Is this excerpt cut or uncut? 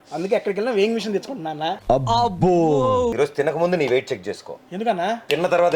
cut